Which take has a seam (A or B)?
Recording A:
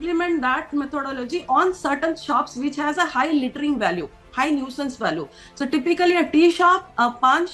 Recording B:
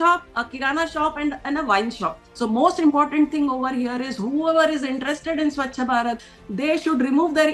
B